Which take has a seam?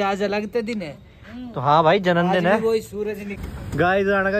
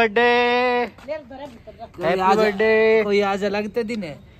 first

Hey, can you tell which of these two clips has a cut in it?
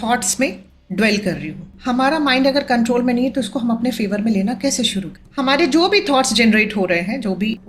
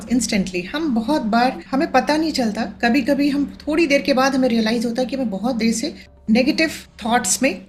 first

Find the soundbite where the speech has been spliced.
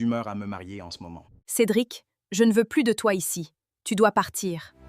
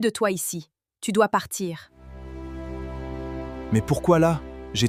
first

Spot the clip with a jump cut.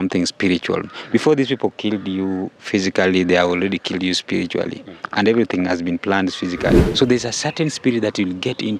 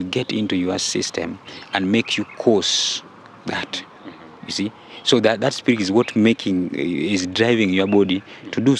first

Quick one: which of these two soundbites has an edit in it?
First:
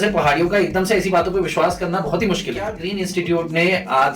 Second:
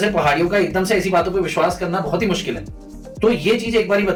first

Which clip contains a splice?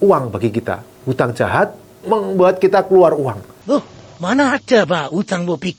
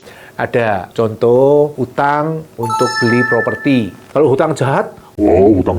second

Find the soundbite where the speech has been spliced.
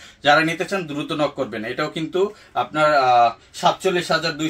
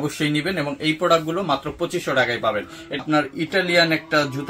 second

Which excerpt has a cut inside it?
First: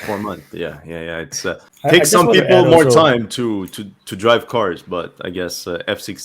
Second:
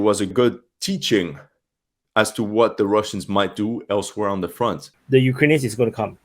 second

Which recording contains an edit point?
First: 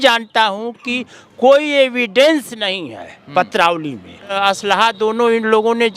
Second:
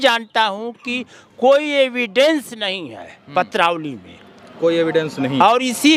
first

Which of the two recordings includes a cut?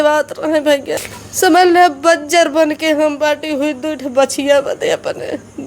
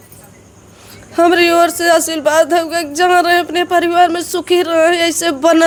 first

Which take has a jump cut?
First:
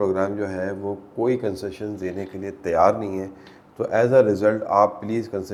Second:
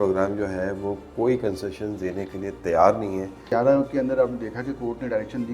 second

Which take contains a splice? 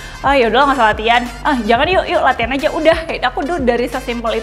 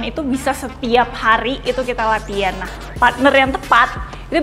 second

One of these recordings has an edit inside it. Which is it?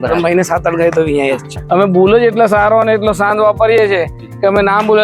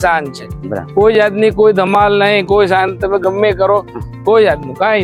first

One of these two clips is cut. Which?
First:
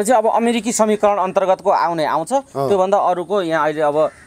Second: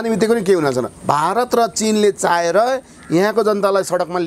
second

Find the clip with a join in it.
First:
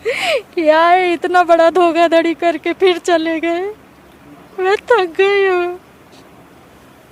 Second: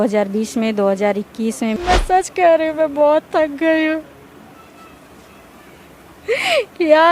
second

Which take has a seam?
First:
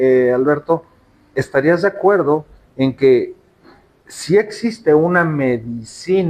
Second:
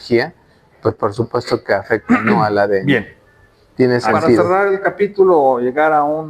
second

